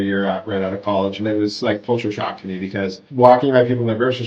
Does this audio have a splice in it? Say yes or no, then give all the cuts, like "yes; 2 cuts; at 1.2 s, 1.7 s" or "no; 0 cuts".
no; 0 cuts